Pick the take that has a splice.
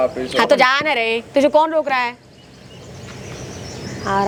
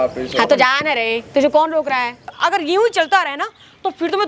second; 1 cut; at 2.3 s

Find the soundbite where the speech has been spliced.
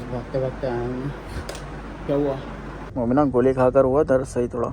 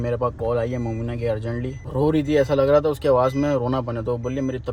first; 1 cut; at 2.8 s

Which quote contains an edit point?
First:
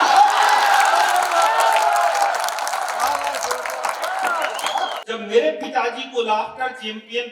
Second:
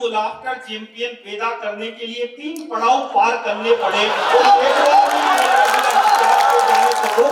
first; 1 cut; at 5.0 s

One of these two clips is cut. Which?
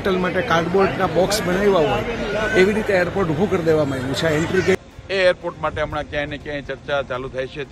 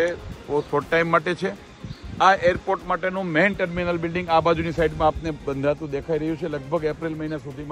first; 1 cut; at 4.8 s

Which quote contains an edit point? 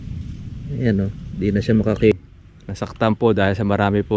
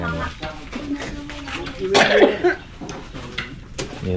first; 1 cut; at 2.1 s

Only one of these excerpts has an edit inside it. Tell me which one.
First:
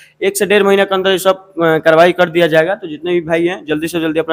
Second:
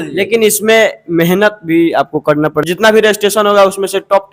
second; 1 cut; at 2.6 s

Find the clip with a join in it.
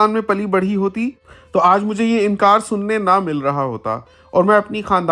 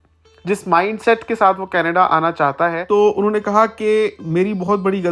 second; 1 cut; at 2.8 s

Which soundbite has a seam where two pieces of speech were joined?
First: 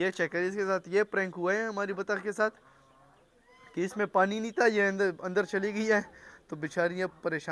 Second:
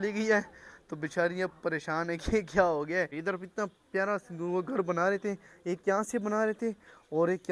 second; 1 cut; at 3.2 s

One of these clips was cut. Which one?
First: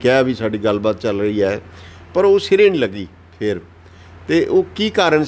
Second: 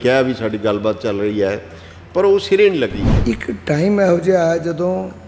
second; 1 cut; at 3.1 s

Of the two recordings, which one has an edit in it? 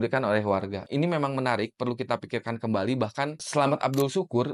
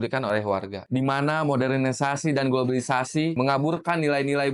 second; 2 cuts; at 0.8 s, 3.3 s

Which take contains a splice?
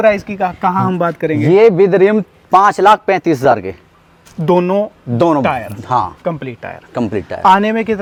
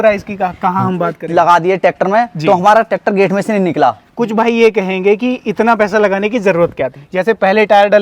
second; 3 cuts; at 1.2 s, 4.1 s, 7.0 s

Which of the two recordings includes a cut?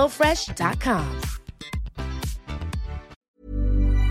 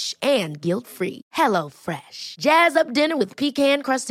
first; 1 cut; at 3.1 s

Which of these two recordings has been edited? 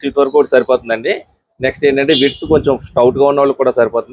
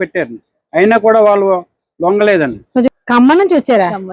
second; 1 cut; at 2.9 s

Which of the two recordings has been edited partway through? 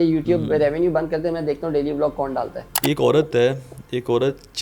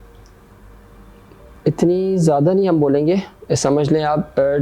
first; 1 cut; at 2.7 s

